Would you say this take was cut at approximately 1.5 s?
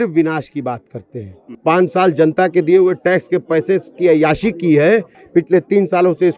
yes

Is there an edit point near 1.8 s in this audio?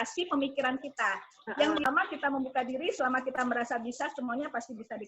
yes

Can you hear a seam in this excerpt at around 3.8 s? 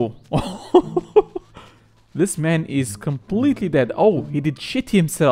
no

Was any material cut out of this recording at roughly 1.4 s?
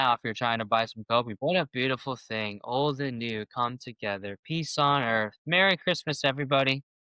yes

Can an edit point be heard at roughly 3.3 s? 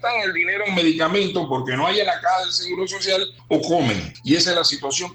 yes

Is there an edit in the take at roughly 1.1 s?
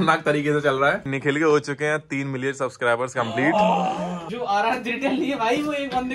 yes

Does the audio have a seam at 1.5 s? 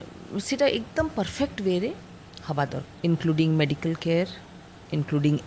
no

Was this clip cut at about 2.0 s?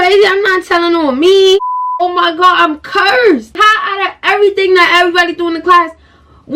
yes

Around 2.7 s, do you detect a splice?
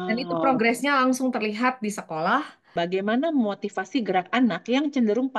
yes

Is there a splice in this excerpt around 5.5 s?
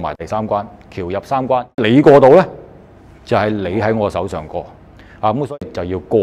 yes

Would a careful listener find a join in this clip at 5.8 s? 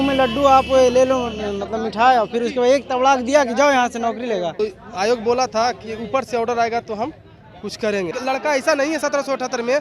no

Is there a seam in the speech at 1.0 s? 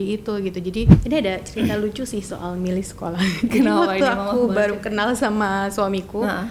yes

